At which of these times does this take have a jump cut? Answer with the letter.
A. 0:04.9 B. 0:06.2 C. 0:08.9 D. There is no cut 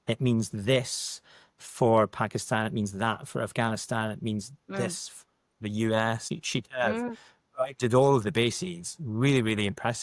B